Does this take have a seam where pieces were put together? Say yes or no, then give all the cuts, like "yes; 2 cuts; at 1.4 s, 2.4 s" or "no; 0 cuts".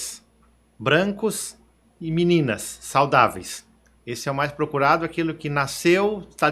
no; 0 cuts